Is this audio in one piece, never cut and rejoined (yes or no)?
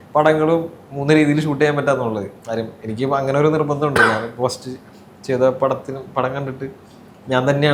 yes